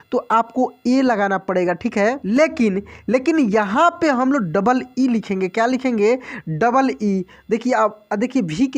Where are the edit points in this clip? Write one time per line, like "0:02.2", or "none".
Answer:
0:02.2